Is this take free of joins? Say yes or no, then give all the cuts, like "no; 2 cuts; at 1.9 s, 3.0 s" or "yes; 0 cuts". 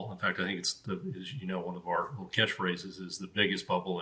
yes; 0 cuts